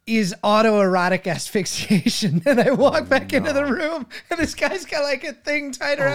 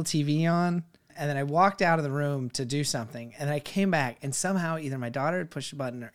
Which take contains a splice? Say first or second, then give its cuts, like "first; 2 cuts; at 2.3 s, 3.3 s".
second; 1 cut; at 1.1 s